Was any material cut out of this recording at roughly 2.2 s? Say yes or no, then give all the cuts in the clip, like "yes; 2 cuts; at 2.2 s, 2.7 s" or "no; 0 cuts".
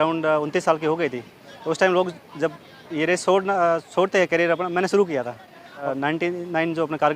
no; 1 cut; at 5.8 s